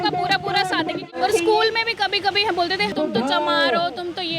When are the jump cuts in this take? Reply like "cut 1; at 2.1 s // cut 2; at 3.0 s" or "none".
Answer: cut 1; at 1.1 s // cut 2; at 2.9 s

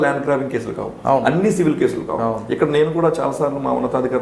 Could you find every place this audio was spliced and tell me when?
none

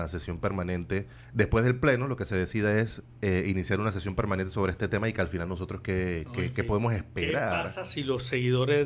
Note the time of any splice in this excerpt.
cut 1; at 1.2 s

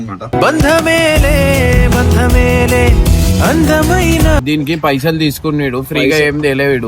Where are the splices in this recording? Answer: cut 1; at 4.4 s

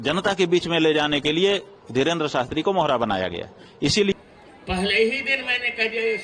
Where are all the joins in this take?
cut 1; at 4.1 s

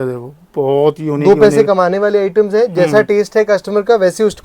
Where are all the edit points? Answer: none

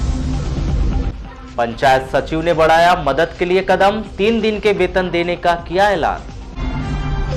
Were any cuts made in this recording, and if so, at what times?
cut 1; at 0.9 s

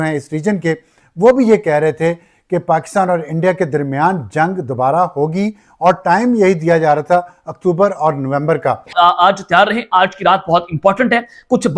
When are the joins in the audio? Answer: cut 1; at 8.9 s

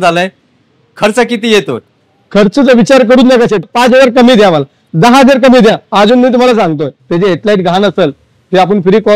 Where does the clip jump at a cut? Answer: cut 1; at 3.6 s // cut 2; at 7.0 s

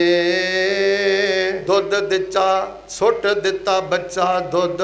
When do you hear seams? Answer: cut 1; at 1.6 s

